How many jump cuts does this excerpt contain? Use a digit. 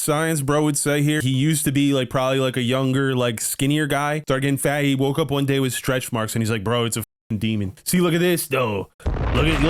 2